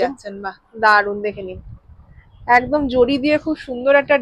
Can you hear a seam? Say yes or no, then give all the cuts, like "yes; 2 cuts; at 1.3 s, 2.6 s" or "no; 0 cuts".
no; 0 cuts